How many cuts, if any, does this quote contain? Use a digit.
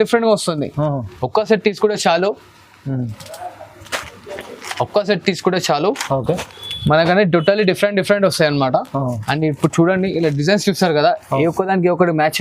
0